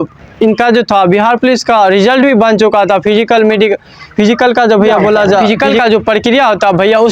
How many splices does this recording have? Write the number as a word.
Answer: one